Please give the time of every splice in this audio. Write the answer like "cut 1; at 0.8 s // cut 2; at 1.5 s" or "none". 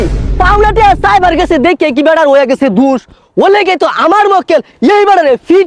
none